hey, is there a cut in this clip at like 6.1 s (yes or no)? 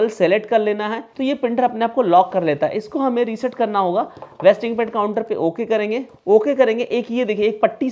yes